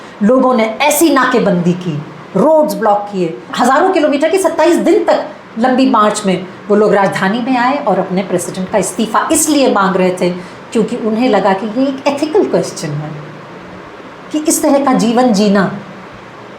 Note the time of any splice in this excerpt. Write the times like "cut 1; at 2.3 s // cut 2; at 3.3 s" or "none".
none